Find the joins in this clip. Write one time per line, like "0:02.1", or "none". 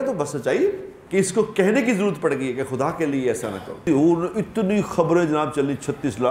0:00.9
0:03.8

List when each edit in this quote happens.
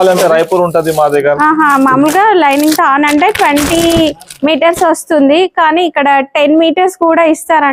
none

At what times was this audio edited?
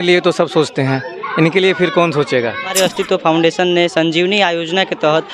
0:02.7

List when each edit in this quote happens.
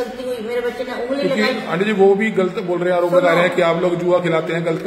none

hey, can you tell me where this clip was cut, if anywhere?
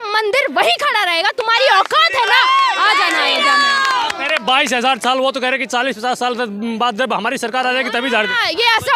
none

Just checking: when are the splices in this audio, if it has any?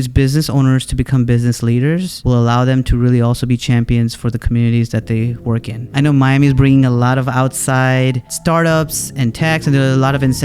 0:02.1
0:05.8
0:08.3

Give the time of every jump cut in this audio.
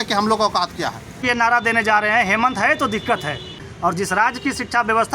0:01.3
0:03.7

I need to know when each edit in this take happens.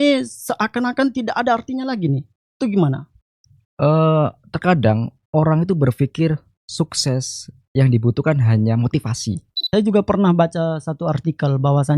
0:09.6

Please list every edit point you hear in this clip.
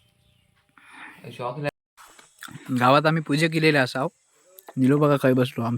0:01.7

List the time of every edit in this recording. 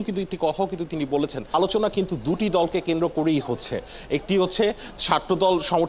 0:01.5

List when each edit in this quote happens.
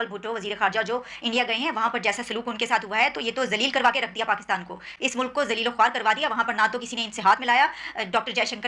none

